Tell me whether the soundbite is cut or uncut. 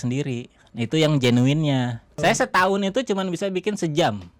cut